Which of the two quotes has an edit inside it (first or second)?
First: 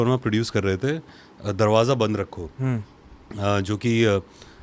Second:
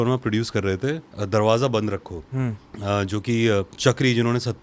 second